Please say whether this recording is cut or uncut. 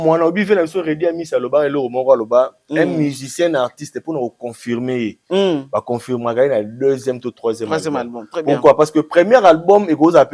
uncut